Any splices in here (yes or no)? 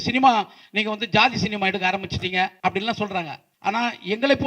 yes